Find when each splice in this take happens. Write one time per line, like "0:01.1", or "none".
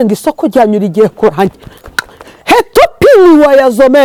none